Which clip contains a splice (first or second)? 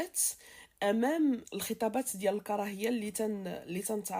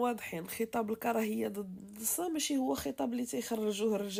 first